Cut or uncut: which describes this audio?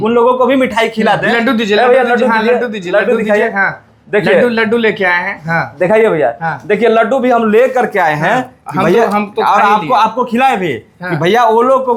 uncut